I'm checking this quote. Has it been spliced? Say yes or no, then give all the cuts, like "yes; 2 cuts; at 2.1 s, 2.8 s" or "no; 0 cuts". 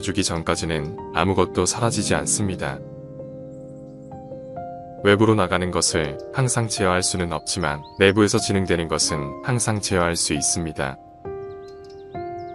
no; 0 cuts